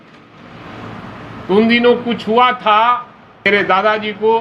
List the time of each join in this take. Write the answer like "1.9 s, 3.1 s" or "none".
3.5 s